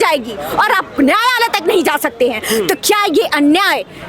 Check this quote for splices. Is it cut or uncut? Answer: uncut